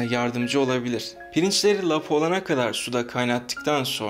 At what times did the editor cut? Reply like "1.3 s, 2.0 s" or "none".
1.2 s